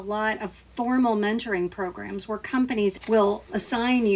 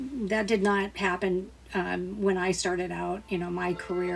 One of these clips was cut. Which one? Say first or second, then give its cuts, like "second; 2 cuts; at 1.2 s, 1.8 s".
first; 1 cut; at 3.0 s